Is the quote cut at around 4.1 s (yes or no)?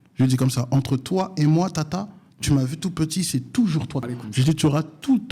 yes